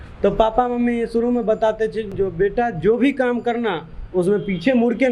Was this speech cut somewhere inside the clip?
yes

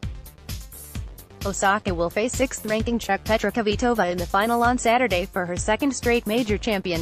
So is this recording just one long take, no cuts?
no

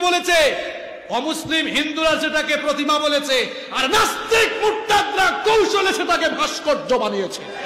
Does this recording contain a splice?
no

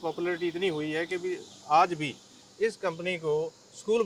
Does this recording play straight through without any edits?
yes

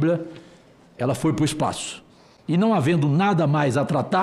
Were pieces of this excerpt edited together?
no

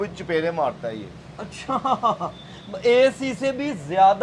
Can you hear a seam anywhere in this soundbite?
no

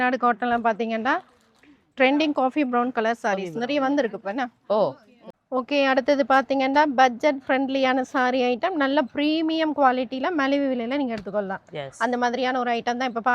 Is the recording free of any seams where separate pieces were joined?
no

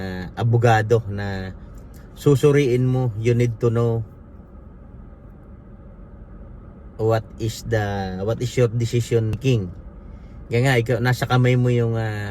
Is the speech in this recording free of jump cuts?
no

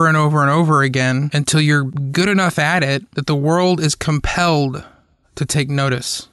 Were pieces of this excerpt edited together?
yes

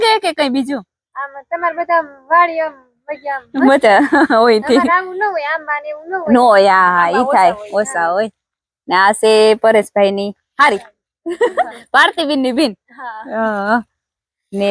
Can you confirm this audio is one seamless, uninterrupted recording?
yes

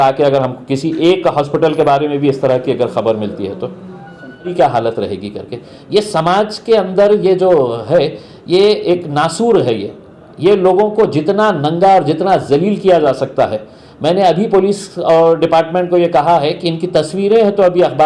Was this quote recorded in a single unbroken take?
no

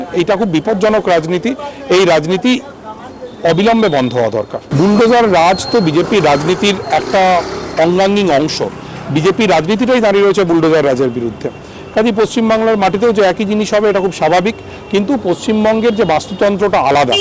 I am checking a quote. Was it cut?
no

